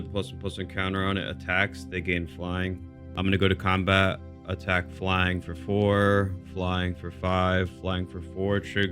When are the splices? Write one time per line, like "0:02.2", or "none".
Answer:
0:03.1